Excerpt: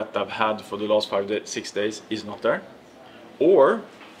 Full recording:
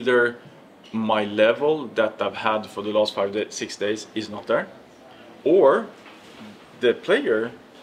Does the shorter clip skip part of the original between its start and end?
no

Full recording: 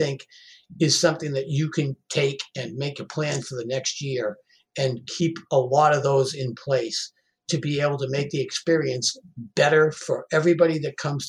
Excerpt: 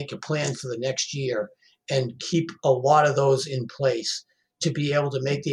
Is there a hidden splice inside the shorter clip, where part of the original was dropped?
no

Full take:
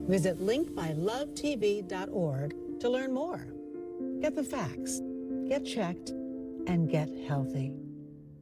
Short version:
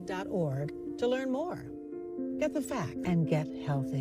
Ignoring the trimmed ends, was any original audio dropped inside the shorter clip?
yes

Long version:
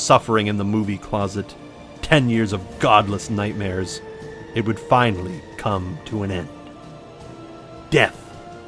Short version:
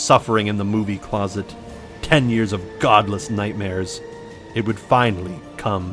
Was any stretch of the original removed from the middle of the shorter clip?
no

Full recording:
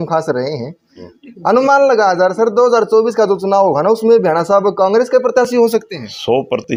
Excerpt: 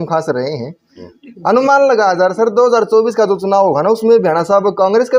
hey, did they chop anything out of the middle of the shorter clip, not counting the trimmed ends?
no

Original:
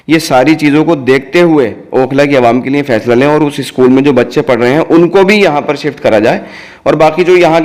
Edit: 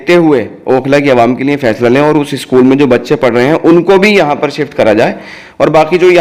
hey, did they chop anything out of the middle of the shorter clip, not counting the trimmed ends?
no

